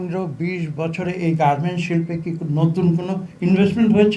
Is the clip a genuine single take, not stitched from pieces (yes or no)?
yes